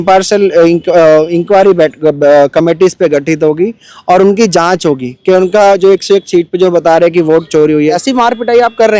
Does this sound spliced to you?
yes; 1 cut; at 7.9 s

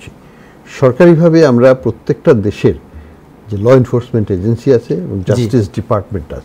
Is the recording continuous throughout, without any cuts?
yes; 0 cuts

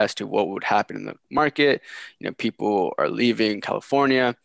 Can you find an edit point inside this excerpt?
no; 0 cuts

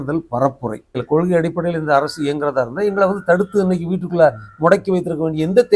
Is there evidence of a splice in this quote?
yes; 1 cut; at 1.0 s

